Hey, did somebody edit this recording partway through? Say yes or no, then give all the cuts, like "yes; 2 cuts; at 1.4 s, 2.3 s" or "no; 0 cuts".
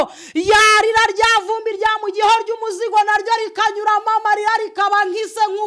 no; 0 cuts